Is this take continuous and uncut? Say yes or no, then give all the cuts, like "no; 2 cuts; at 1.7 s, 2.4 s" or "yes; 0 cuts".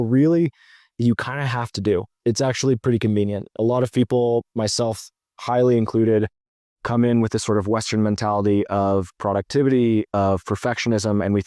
no; 2 cuts; at 2.1 s, 3.5 s